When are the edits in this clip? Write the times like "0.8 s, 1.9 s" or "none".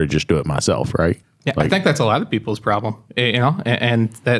1.3 s